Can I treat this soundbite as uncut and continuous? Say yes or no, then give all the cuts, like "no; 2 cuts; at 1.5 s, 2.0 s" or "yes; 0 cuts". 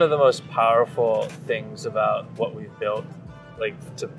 yes; 0 cuts